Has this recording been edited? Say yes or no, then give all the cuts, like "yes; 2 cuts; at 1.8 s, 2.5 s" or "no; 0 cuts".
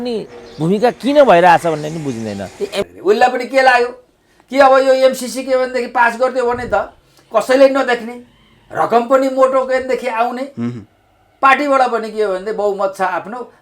yes; 1 cut; at 2.8 s